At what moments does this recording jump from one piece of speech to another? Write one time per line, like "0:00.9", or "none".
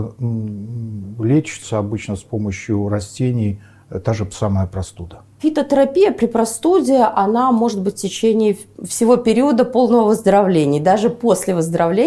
0:05.4